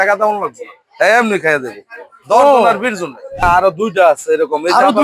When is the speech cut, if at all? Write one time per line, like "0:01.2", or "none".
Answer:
0:03.4